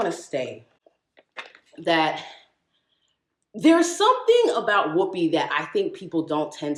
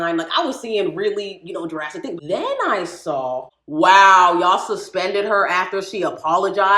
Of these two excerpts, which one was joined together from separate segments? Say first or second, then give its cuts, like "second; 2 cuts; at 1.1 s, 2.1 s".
second; 2 cuts; at 2.2 s, 3.5 s